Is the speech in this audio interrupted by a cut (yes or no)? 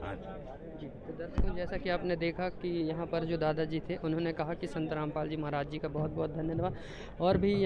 no